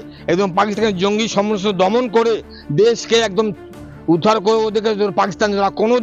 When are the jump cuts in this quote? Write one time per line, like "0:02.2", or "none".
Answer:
none